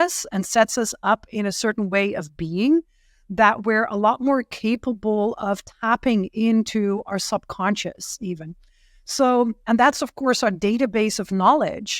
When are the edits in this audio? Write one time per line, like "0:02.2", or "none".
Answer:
none